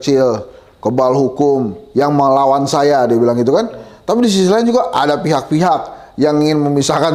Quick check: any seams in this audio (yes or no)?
no